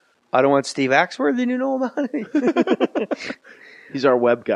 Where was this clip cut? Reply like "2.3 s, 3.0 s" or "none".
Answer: none